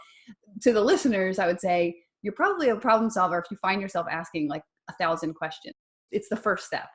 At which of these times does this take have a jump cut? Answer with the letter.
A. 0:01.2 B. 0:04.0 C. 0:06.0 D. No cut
C